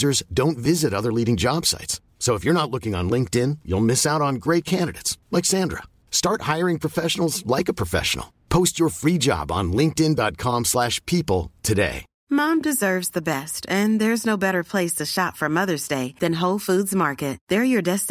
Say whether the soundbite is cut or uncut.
cut